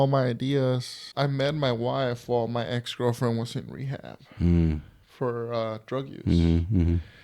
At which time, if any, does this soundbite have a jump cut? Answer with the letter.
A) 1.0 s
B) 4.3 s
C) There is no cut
A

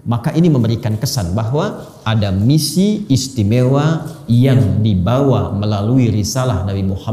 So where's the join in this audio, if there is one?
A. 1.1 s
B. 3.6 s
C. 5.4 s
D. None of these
D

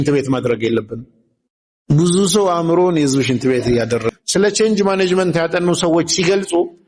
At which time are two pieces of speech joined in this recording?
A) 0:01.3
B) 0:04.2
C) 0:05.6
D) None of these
B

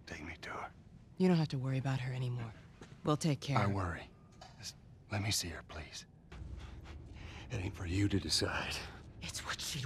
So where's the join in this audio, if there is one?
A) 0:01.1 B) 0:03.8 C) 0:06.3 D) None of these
C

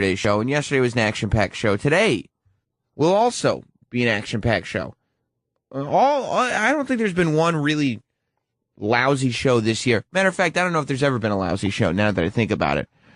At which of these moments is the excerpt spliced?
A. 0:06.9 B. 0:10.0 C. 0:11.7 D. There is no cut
A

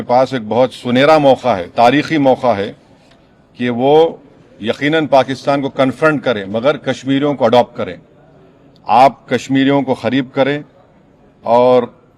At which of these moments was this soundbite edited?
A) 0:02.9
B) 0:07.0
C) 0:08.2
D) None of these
D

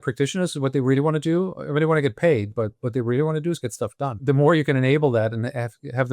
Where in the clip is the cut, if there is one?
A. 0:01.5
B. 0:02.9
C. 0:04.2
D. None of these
C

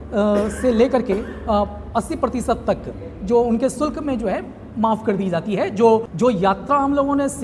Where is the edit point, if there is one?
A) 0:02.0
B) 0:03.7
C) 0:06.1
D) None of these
C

